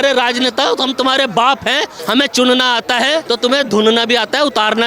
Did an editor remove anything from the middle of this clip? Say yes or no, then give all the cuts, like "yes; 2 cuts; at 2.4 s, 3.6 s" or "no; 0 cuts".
yes; 2 cuts; at 1.9 s, 3.2 s